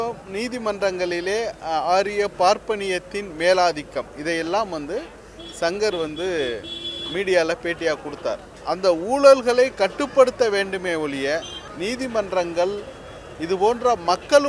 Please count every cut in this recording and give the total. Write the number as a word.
two